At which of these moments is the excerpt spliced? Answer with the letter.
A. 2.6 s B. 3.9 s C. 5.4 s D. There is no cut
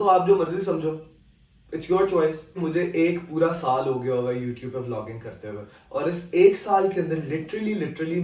A